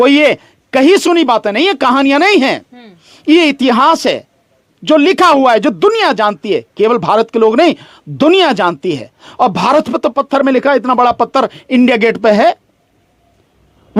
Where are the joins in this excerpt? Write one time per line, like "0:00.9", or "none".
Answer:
none

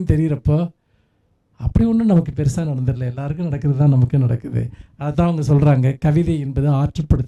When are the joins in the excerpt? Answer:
none

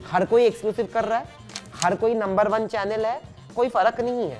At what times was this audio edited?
0:03.4

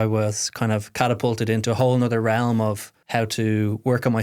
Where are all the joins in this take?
0:02.9

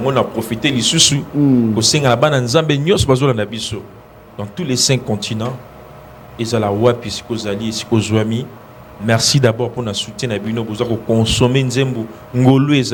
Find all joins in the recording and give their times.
none

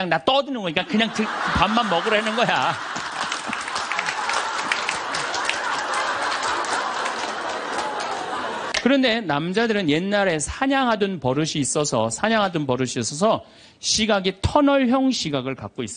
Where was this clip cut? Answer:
0:08.6

